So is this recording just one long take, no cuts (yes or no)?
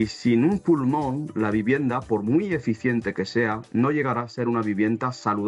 yes